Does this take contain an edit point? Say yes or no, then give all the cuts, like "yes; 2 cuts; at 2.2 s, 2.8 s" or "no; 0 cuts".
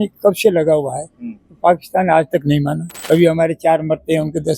yes; 1 cut; at 2.9 s